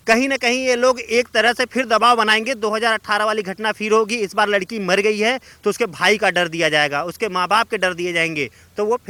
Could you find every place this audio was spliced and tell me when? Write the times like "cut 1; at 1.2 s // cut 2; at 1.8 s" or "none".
none